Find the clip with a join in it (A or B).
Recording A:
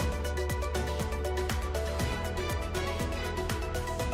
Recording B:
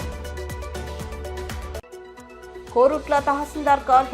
B